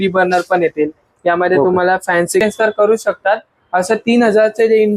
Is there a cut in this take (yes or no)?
yes